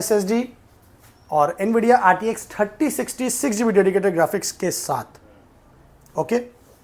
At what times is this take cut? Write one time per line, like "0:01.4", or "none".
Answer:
none